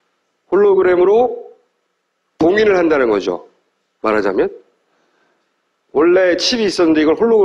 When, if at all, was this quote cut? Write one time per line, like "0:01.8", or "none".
0:03.9